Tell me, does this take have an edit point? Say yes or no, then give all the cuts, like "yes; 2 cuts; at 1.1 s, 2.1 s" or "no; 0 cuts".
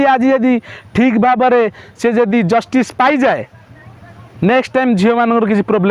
no; 0 cuts